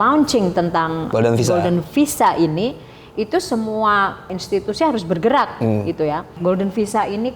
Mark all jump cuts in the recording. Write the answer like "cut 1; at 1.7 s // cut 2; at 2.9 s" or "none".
cut 1; at 1.1 s // cut 2; at 4.4 s // cut 3; at 6.3 s

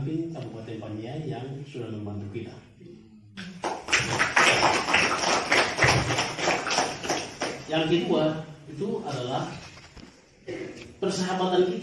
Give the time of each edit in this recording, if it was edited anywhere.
cut 1; at 7.6 s

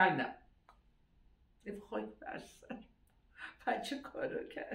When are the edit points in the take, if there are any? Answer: none

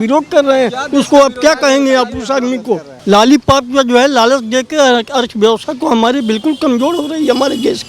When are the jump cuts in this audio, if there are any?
cut 1; at 2.9 s

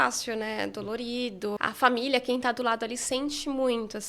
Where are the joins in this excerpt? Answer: cut 1; at 1.6 s

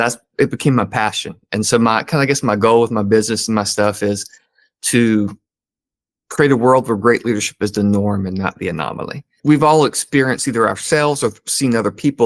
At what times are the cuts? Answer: cut 1; at 9.3 s

